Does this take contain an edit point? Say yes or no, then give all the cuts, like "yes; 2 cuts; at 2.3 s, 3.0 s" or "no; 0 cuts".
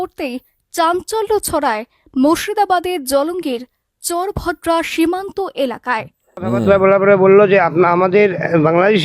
yes; 1 cut; at 6.6 s